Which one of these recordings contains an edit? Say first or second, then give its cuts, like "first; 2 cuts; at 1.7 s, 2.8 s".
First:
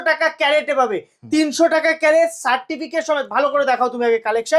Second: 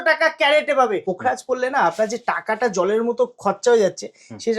second; 1 cut; at 1.0 s